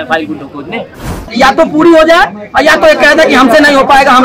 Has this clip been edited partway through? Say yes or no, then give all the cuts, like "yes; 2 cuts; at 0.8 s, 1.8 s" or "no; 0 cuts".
yes; 1 cut; at 1.3 s